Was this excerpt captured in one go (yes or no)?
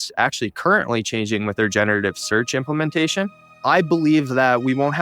no